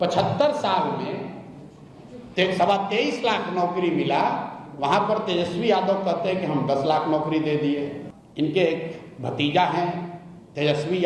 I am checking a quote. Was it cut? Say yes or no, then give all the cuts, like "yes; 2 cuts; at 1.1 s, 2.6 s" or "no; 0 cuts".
yes; 1 cut; at 8.0 s